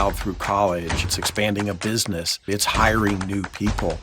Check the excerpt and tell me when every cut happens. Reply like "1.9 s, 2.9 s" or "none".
1.0 s, 2.4 s